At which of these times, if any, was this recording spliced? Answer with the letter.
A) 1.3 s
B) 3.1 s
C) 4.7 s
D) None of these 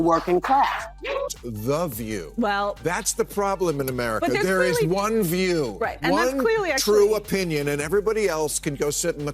A